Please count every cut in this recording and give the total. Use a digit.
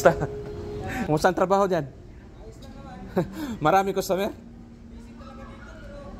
1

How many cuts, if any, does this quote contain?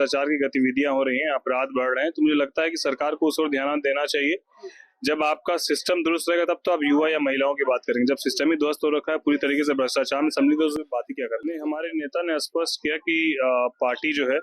1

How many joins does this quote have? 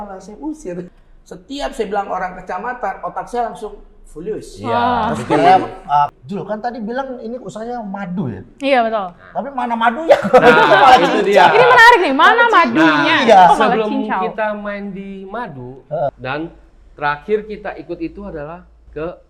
3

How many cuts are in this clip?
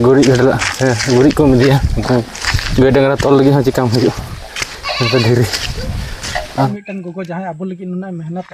1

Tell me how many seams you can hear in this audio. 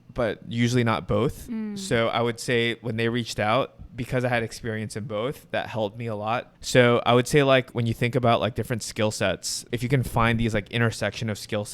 4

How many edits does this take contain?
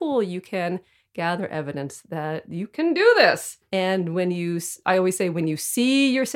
1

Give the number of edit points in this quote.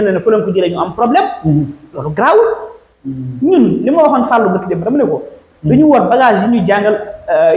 0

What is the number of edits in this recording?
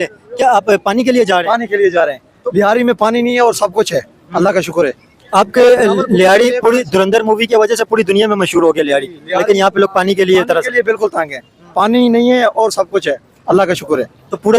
0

